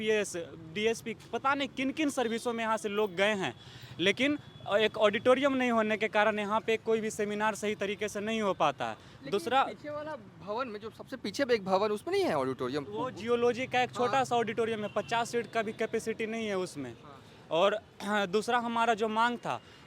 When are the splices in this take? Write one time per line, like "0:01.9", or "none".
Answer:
none

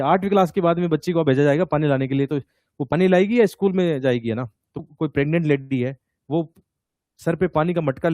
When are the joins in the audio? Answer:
0:04.8

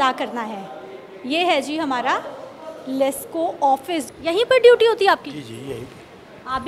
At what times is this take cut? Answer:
0:04.1

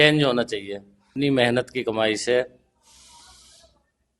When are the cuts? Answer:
0:01.1

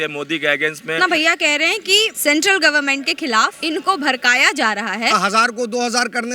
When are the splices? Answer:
0:01.0
0:02.1
0:03.6
0:05.2

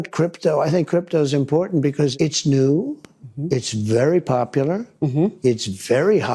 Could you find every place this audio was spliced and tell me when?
0:02.1

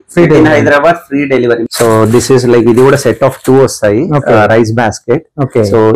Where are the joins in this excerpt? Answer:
0:01.6

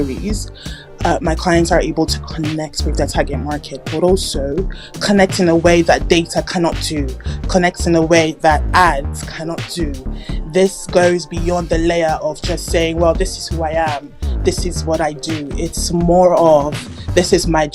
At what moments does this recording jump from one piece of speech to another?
none

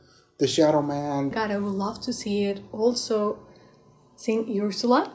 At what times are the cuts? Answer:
0:01.4

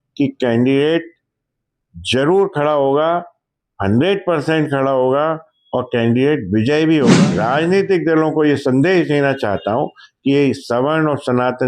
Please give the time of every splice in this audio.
0:07.1

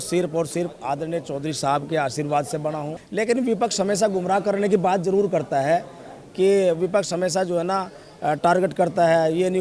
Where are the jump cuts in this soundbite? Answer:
0:03.0

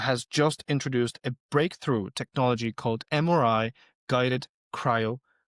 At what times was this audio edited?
none

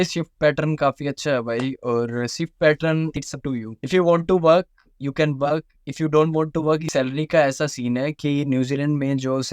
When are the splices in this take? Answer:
0:03.2
0:06.9

